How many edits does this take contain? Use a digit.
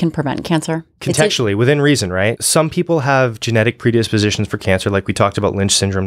2